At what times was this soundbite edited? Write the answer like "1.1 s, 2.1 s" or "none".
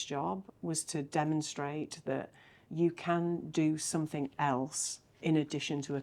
2.7 s